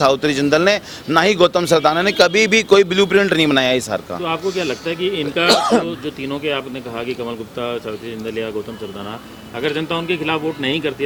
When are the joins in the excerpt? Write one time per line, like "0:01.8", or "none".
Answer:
none